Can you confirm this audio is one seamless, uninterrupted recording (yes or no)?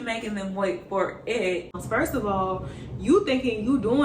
no